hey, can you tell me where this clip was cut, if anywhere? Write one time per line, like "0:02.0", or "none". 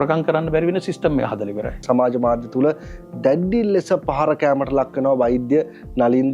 0:01.8